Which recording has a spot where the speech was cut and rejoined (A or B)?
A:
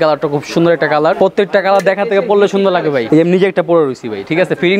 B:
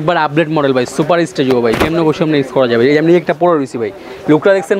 A